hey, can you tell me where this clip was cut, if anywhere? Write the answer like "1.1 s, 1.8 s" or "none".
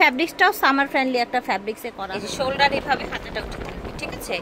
1.9 s